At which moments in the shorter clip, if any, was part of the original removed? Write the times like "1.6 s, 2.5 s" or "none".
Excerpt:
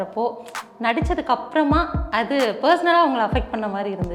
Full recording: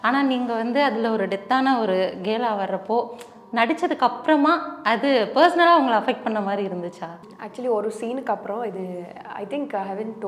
none